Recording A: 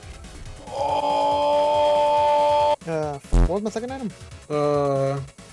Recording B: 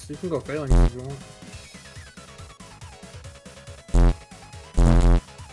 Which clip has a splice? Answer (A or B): A